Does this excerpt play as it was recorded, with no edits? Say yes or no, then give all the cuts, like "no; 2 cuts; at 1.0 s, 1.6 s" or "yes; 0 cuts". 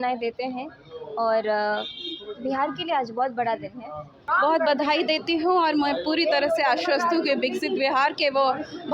no; 1 cut; at 4.3 s